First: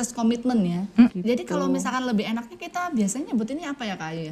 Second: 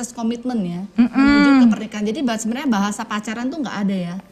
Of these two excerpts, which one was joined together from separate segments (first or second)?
first